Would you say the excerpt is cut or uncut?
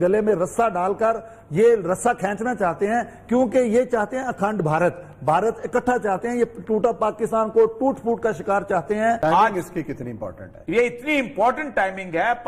uncut